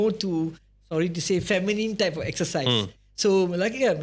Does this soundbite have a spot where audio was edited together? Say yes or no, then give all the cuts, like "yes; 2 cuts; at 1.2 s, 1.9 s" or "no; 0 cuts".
no; 0 cuts